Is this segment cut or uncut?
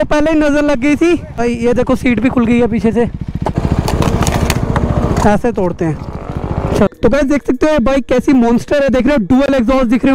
cut